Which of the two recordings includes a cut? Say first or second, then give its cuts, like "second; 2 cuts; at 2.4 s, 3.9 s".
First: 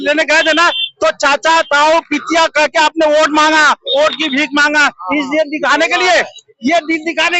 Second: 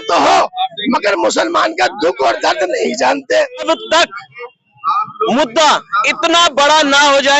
second; 1 cut; at 3.6 s